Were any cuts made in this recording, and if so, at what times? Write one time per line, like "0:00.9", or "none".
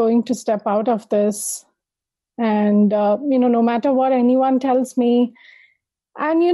none